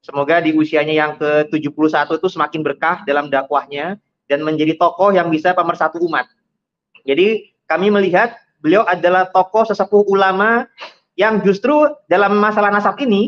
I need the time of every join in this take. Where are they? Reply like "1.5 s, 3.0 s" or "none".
none